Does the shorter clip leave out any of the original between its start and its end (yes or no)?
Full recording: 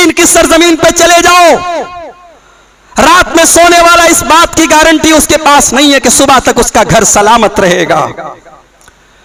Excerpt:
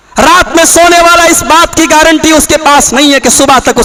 no